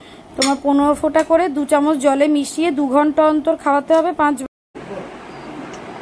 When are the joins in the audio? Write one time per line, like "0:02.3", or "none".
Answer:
0:04.4

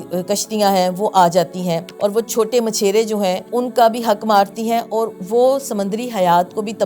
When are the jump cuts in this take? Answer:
0:01.9
0:03.4

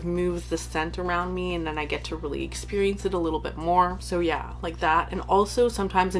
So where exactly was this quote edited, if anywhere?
none

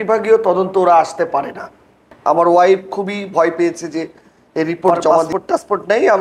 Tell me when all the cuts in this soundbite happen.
0:02.1
0:05.3

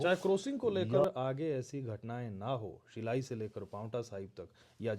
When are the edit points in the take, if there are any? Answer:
0:01.0

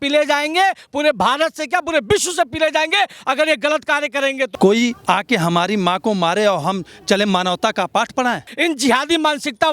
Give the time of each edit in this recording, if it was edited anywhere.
0:04.5
0:08.5

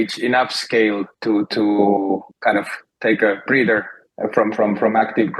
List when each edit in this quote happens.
0:01.1
0:02.3

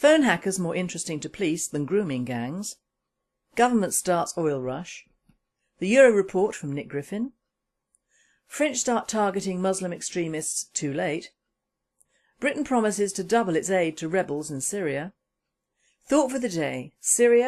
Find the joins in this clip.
none

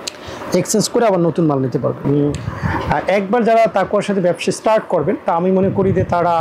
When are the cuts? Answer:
0:02.0

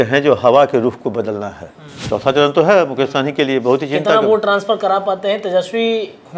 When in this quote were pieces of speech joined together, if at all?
0:01.9

